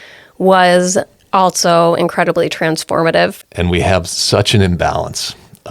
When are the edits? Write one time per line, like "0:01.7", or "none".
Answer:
0:03.4